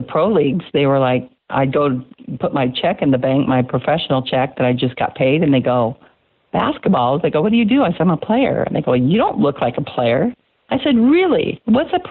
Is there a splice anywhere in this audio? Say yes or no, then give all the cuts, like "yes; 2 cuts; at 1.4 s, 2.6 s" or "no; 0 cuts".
no; 0 cuts